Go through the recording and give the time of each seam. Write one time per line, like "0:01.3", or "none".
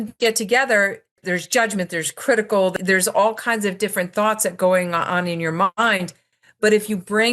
0:01.2
0:02.7